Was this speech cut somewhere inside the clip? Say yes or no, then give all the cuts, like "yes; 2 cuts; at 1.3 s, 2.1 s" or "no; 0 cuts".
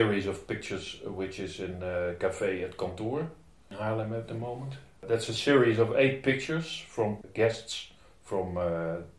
yes; 3 cuts; at 3.7 s, 5.0 s, 7.3 s